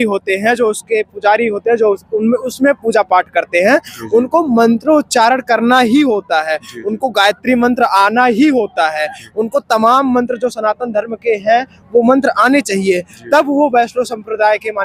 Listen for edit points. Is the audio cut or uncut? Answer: uncut